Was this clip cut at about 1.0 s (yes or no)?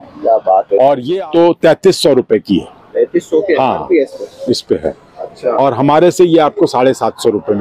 yes